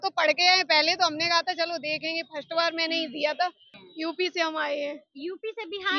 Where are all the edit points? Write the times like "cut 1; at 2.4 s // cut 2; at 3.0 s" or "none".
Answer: cut 1; at 3.7 s